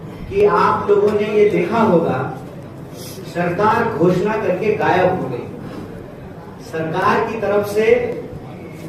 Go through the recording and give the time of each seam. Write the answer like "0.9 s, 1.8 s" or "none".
none